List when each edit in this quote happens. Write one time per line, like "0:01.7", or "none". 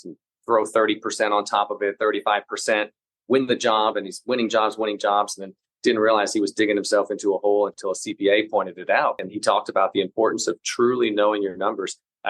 0:09.3